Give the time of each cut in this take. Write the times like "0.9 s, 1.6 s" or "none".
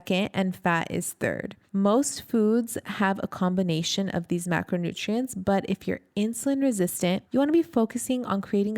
1.5 s, 7.2 s